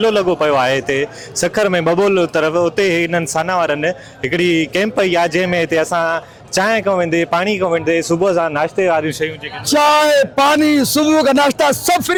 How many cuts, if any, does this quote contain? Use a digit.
0